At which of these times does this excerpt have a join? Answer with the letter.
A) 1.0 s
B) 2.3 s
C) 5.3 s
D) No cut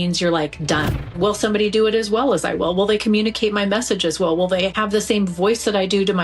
A